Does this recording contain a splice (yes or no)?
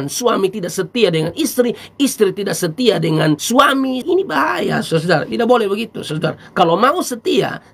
yes